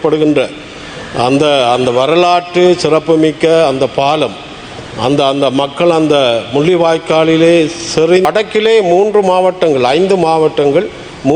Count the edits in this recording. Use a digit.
1